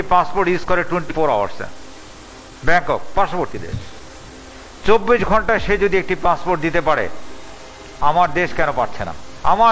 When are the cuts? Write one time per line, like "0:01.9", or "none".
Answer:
0:01.1